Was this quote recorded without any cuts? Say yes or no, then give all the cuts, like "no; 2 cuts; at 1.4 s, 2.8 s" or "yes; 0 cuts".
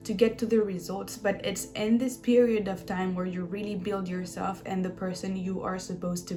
yes; 0 cuts